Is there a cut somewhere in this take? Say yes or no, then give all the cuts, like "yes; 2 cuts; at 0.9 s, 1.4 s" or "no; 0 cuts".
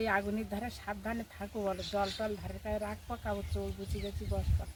no; 0 cuts